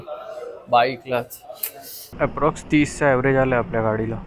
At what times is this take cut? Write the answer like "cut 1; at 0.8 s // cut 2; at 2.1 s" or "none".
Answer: cut 1; at 2.1 s